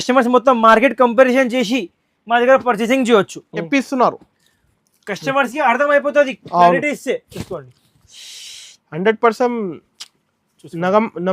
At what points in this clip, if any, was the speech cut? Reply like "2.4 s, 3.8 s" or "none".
3.7 s